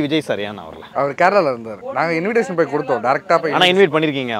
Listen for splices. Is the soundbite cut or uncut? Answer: cut